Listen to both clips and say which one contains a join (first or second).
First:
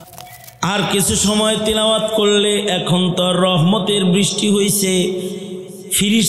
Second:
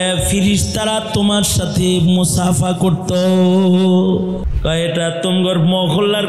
second